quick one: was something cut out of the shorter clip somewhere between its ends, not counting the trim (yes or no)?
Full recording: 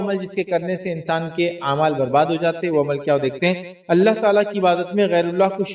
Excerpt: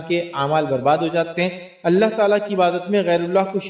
yes